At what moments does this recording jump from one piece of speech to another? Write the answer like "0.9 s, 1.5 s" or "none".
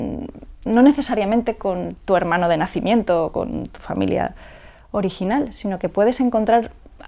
none